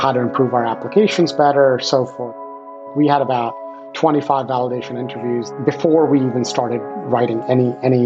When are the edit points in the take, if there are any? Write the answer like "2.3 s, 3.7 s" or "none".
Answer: 2.5 s, 5.5 s